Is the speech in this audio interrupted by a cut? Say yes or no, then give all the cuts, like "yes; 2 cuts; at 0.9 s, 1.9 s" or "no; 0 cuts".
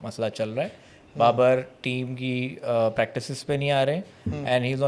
no; 0 cuts